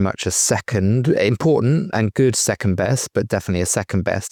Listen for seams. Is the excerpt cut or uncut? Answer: uncut